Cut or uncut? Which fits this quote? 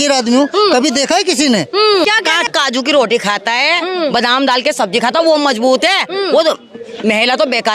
cut